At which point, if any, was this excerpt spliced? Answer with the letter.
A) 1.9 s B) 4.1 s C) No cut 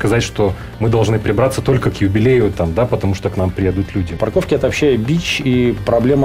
B